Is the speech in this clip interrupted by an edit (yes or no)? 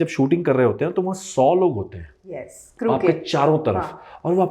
no